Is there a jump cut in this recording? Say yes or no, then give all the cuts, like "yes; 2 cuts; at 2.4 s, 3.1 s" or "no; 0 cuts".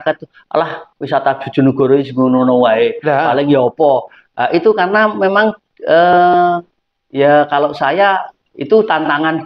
no; 0 cuts